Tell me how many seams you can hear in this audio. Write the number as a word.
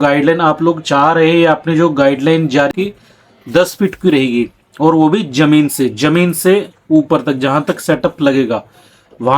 one